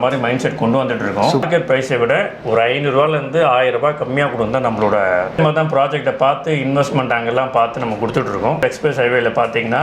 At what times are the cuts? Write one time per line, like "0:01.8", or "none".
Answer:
0:01.4
0:05.4
0:08.5